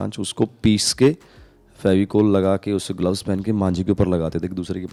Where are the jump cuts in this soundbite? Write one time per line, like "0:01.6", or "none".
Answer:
none

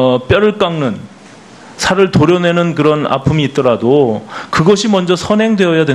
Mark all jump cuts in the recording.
0:04.5

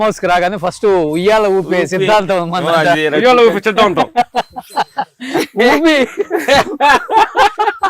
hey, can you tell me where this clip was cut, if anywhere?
none

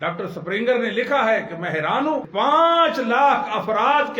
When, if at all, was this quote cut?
0:02.3

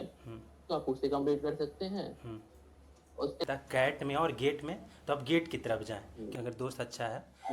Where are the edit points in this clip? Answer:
0:03.4
0:06.3

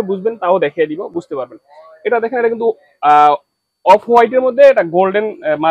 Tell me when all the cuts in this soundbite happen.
none

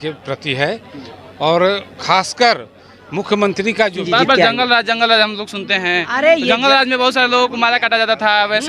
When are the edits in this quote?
0:04.0

